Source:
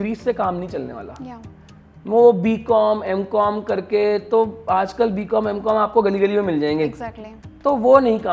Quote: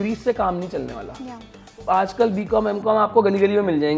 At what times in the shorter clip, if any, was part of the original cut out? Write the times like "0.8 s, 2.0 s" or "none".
1.8 s